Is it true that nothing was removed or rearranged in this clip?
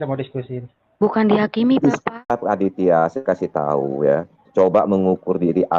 no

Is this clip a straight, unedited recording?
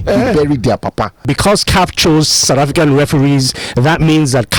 no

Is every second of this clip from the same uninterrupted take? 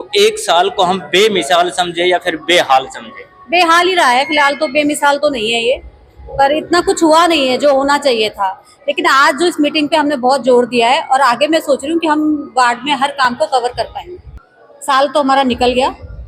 yes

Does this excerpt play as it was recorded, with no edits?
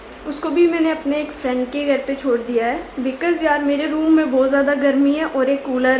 yes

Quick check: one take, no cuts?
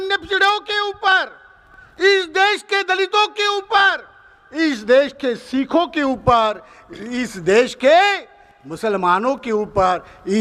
yes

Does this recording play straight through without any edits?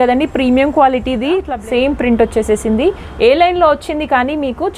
no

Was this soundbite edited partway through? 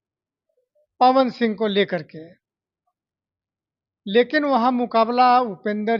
no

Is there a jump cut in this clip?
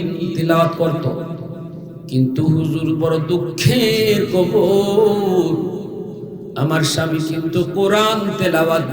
no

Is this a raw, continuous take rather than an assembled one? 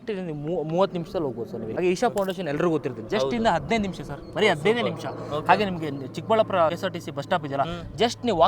no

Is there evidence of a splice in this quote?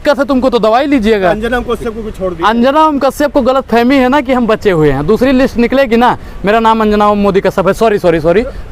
no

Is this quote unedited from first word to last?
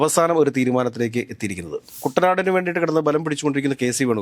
no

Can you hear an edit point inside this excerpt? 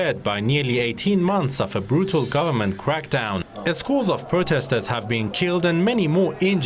yes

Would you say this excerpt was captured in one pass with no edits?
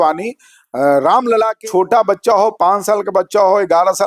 no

